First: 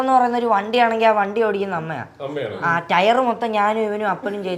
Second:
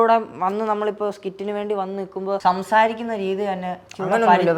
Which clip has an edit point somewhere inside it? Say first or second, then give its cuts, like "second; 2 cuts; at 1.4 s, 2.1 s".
second; 1 cut; at 2.4 s